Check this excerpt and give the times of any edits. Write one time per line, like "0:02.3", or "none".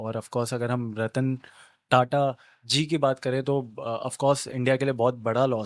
none